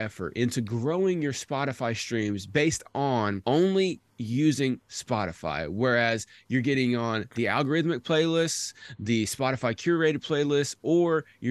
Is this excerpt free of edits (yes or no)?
no